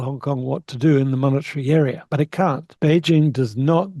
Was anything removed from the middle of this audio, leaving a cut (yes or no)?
yes